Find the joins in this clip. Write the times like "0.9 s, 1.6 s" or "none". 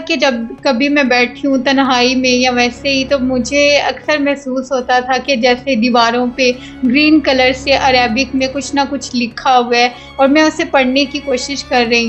none